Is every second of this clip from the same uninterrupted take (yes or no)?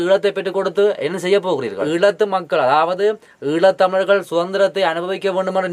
no